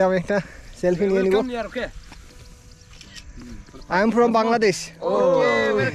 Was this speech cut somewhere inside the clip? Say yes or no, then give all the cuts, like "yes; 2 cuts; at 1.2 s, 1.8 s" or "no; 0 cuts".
no; 0 cuts